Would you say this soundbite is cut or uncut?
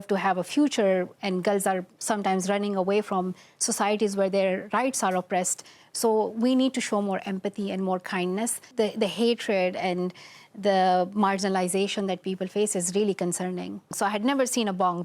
cut